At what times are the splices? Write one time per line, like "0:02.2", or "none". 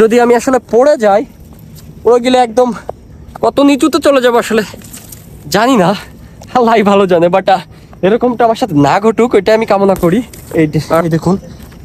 0:10.4

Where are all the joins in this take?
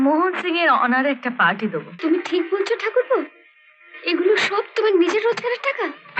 0:01.9

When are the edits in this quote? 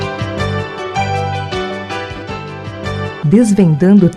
none

